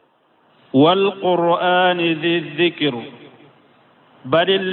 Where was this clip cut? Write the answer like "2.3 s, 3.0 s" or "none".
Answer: 2.2 s